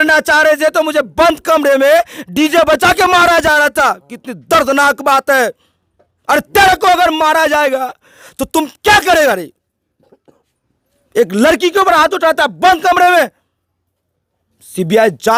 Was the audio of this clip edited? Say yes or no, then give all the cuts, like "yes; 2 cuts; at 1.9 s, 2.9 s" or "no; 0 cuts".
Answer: no; 0 cuts